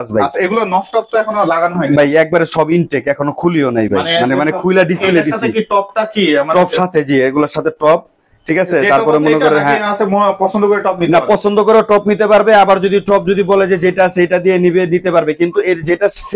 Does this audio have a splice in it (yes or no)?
no